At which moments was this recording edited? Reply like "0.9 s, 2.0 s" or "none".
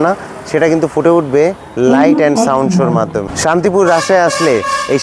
2.9 s